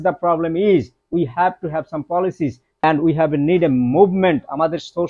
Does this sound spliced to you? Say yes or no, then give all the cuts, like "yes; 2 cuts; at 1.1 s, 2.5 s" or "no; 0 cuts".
yes; 1 cut; at 2.8 s